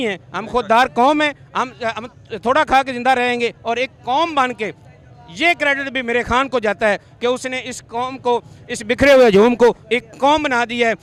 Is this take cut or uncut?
uncut